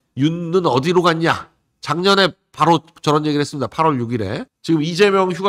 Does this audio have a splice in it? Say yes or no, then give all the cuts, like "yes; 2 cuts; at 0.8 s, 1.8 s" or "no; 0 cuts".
yes; 1 cut; at 4.5 s